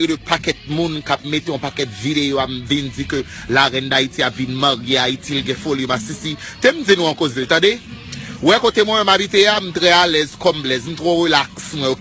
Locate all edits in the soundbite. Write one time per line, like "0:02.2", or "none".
0:07.5